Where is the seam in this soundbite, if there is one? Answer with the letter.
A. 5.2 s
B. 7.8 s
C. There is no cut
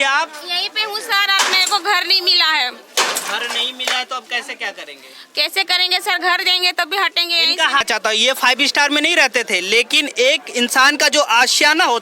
B